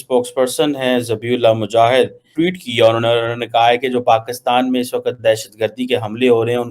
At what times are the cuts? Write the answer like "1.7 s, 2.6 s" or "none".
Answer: 2.2 s